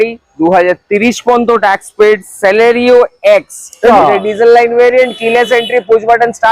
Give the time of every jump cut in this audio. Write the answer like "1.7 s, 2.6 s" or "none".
3.9 s